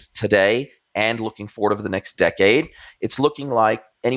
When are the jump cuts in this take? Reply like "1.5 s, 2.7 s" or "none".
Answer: none